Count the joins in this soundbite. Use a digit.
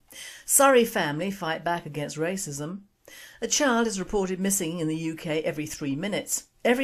1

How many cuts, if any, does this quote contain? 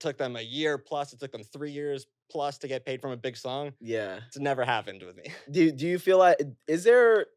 0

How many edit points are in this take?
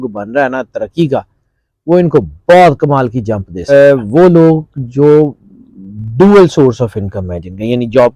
1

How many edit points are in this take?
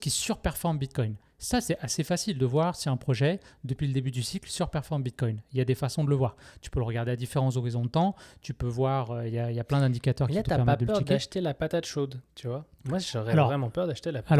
0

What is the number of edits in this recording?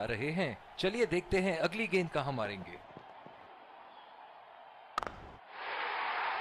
2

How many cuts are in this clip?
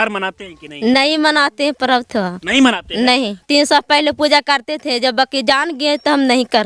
1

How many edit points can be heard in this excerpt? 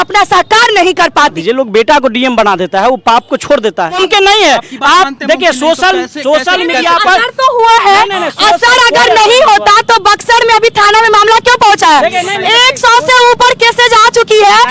2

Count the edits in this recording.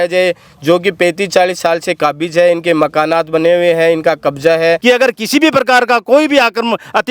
1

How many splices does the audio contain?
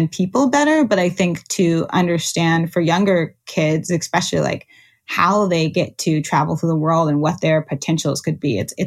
0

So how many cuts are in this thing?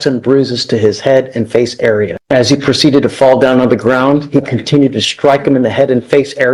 1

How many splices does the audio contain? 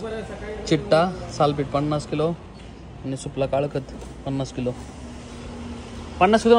0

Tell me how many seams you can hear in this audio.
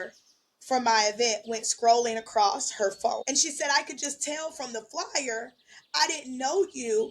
1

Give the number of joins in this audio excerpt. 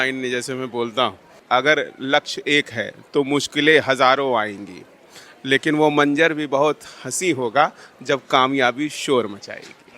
1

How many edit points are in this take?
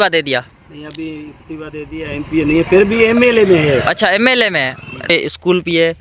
1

